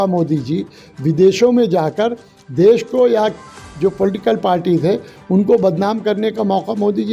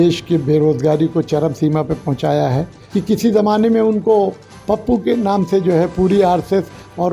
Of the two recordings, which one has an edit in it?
second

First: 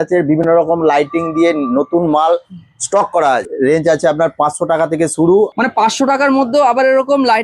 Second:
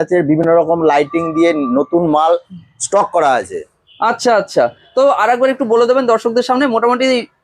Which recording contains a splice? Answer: first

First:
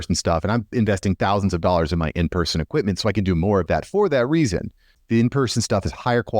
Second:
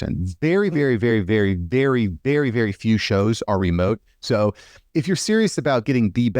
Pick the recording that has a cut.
first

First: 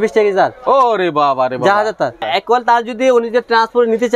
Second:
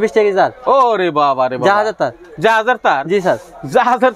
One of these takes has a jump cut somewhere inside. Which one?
first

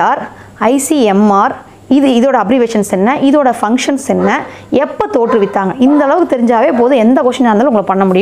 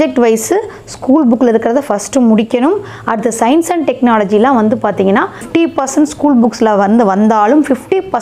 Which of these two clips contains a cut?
second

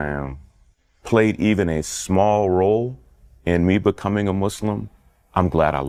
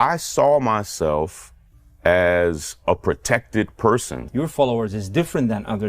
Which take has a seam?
second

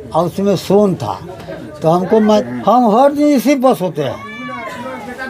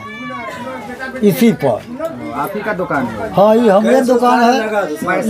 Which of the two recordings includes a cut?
first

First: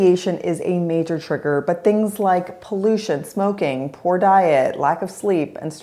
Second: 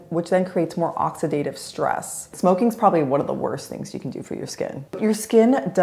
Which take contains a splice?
second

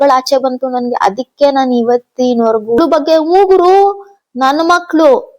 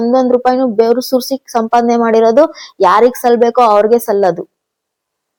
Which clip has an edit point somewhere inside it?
first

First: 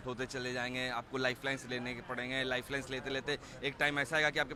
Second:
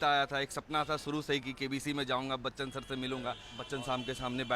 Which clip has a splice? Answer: second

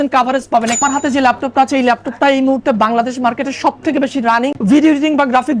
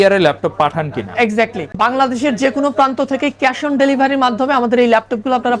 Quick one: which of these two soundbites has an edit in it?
first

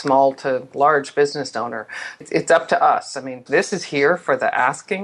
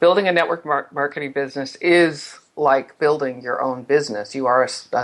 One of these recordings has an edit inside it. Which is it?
first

